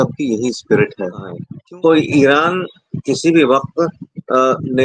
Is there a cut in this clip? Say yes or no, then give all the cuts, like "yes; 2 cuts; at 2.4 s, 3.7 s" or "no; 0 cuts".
yes; 1 cut; at 1.4 s